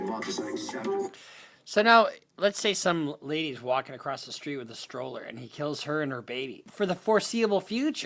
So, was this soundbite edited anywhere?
yes; 1 cut; at 6.6 s

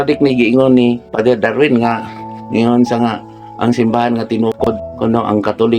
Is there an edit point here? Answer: yes; 2 cuts; at 1.1 s, 4.8 s

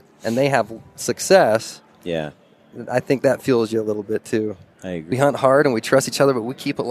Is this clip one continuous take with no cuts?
no; 1 cut; at 5.1 s

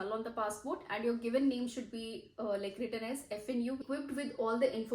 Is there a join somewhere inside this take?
yes; 1 cut; at 3.8 s

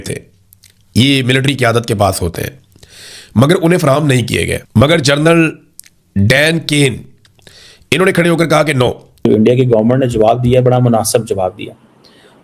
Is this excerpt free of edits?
no; 2 cuts; at 4.6 s, 9.2 s

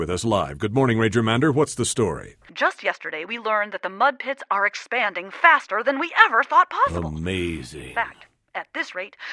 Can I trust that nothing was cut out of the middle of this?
no; 1 cut; at 2.4 s

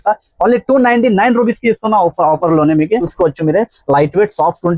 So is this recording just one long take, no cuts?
no; 1 cut; at 3.1 s

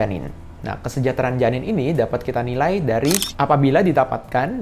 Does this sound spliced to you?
yes; 1 cut; at 3.3 s

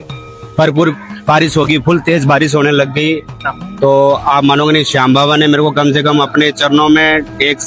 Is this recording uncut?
yes; 0 cuts

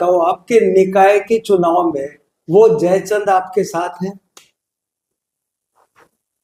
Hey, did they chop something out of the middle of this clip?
no; 0 cuts

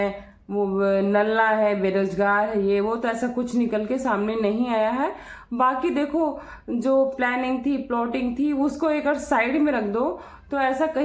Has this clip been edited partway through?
no; 0 cuts

